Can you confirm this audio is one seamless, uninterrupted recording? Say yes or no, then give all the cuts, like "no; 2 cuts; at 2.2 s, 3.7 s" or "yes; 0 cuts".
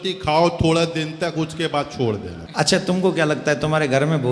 no; 1 cut; at 2.4 s